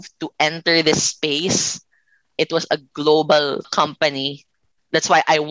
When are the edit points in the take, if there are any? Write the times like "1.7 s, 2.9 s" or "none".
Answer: 2.3 s, 3.7 s